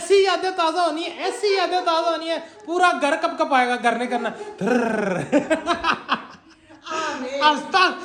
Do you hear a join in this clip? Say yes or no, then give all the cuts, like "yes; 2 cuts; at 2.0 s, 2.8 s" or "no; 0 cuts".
no; 0 cuts